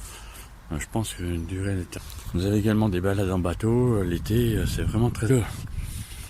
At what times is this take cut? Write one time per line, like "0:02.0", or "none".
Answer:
0:02.0
0:05.3